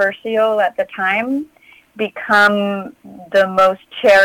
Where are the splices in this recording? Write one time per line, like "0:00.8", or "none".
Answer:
none